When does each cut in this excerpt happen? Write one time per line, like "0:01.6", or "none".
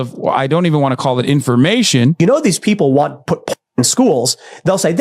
0:02.2